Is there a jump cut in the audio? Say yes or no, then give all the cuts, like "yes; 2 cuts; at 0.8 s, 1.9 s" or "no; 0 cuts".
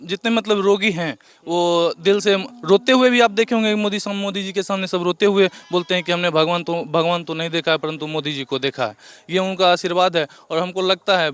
no; 0 cuts